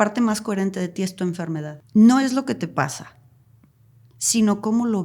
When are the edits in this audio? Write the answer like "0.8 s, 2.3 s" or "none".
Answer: 1.7 s